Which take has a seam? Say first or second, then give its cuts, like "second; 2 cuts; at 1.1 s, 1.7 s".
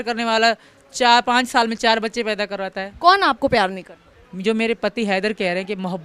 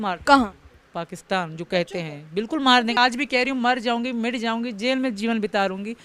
second; 1 cut; at 3.0 s